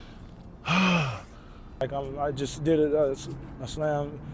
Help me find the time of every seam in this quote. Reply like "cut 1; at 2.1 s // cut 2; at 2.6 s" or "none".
cut 1; at 1.8 s